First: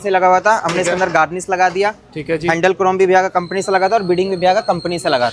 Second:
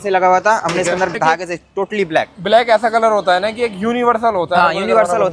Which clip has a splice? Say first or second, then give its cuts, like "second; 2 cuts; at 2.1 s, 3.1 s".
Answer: second; 1 cut; at 1.1 s